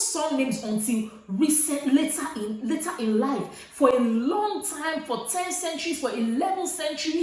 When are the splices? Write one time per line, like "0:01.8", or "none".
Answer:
none

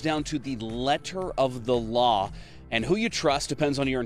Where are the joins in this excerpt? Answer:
none

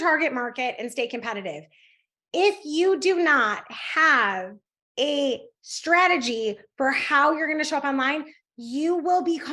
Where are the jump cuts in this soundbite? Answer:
none

